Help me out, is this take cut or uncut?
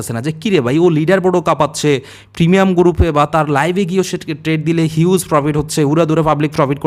uncut